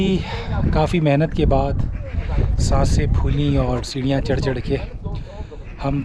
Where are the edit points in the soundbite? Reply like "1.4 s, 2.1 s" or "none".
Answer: none

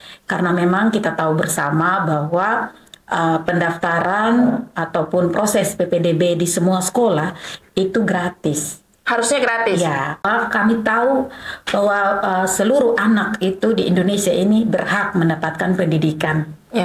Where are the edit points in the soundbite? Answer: 10.3 s

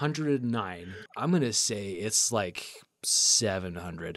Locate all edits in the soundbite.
1.0 s

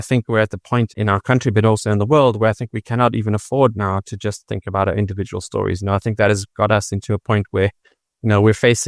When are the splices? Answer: 0.9 s

